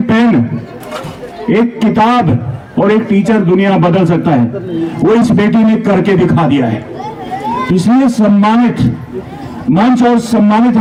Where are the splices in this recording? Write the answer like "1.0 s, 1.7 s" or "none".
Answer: none